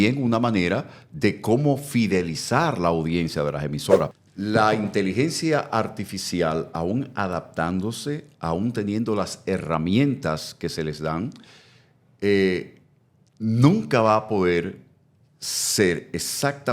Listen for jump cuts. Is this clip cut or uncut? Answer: cut